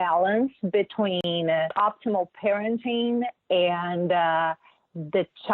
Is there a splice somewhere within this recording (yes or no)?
yes